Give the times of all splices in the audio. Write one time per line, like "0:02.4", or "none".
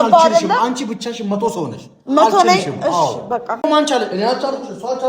0:03.7